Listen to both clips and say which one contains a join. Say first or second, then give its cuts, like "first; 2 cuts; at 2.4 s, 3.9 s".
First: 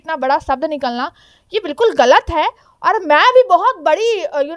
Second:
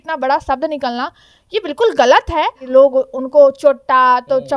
second; 1 cut; at 2.6 s